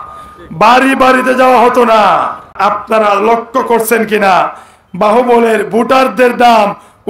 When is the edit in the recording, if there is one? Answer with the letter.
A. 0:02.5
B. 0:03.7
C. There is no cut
A